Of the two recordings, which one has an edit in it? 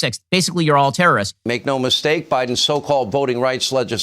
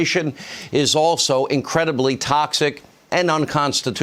first; 1 cut; at 1.4 s

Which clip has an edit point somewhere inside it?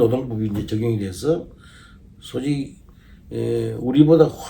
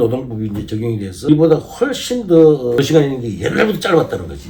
second; 2 cuts; at 1.3 s, 2.8 s

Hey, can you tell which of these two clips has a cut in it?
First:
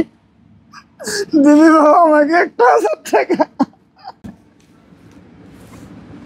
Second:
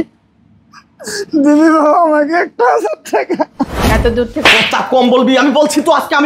second; 1 cut; at 3.8 s

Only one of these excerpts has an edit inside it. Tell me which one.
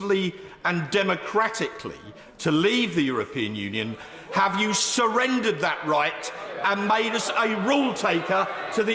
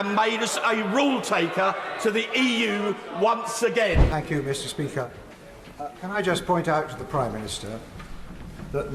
second; 1 cut; at 4.0 s

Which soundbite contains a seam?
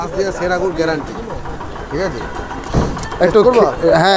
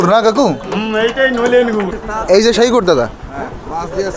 second; 1 cut; at 2.0 s

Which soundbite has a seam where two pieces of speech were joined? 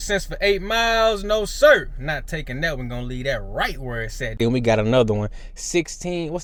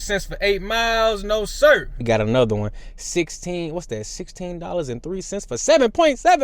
second; 1 cut; at 2.0 s

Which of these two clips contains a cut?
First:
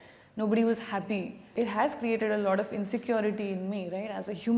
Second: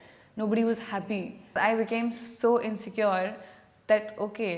second; 1 cut; at 1.5 s

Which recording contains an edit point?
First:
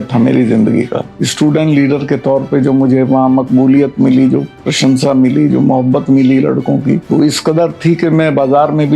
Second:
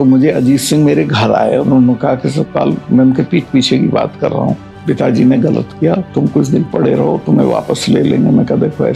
first; 3 cuts; at 1.2 s, 4.6 s, 7.0 s

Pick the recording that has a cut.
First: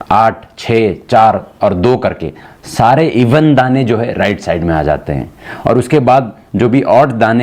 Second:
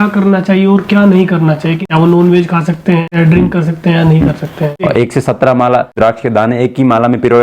second; 4 cuts; at 1.8 s, 3.1 s, 4.8 s, 6.0 s

